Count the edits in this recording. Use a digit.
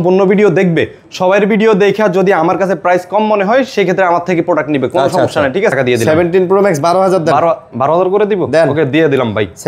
1